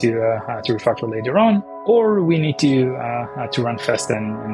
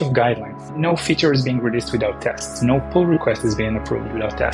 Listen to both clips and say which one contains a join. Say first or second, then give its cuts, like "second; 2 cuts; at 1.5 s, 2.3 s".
first; 1 cut; at 1.7 s